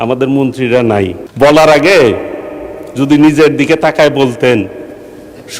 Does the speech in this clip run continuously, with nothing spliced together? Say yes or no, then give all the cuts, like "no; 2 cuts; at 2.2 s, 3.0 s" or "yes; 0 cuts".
no; 1 cut; at 1.2 s